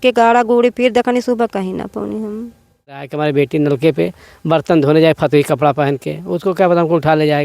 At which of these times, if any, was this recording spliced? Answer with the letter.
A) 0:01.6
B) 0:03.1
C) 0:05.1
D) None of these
B